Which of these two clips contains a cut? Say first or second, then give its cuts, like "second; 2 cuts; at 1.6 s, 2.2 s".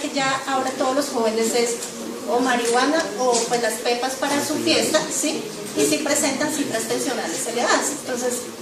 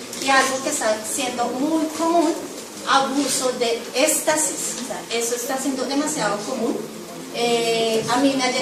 first; 1 cut; at 4.0 s